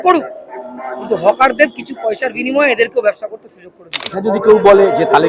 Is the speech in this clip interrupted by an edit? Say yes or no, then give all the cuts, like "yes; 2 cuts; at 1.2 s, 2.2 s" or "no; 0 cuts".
yes; 1 cut; at 4.1 s